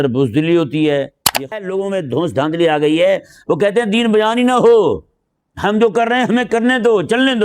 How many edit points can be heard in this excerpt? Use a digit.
1